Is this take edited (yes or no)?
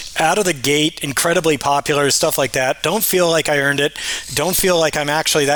no